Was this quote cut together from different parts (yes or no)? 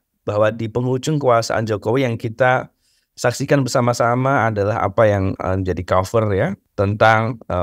yes